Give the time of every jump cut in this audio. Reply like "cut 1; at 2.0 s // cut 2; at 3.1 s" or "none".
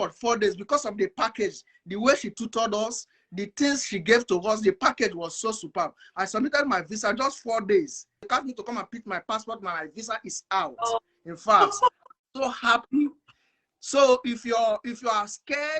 cut 1; at 8.3 s